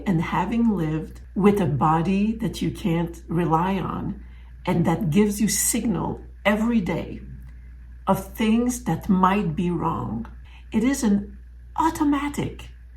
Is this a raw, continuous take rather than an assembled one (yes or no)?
no